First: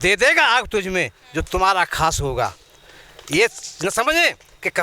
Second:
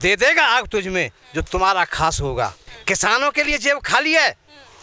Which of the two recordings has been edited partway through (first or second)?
second